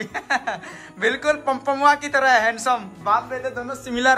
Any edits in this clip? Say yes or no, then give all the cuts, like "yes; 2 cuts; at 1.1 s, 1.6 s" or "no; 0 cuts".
no; 0 cuts